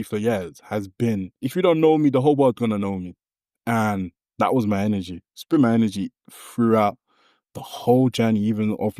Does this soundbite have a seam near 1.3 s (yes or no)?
yes